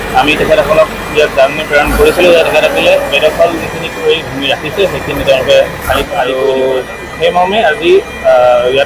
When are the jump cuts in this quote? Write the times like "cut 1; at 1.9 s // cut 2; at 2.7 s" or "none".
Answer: cut 1; at 6.2 s